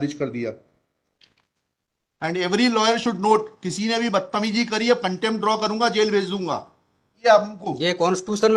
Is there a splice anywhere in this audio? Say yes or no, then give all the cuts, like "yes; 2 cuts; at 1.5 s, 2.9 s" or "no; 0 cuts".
yes; 2 cuts; at 1.2 s, 7.2 s